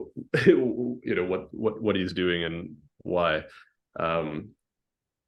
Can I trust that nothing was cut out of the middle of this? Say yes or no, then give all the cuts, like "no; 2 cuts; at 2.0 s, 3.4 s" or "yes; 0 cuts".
yes; 0 cuts